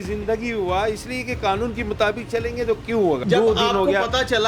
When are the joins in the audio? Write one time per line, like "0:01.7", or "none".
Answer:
0:03.2